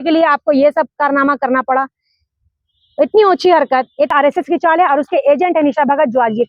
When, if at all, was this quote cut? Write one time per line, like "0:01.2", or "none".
0:04.1